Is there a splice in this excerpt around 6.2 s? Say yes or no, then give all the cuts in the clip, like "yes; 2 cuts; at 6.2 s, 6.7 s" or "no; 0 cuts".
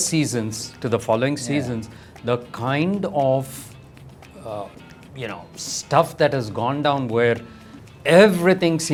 no; 0 cuts